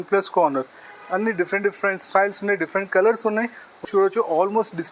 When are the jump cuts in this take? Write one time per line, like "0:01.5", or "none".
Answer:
0:03.9